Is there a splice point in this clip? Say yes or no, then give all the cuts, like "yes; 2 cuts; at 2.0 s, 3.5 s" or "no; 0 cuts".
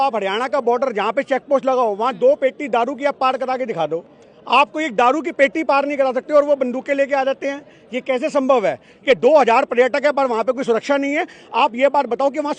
yes; 1 cut; at 8.9 s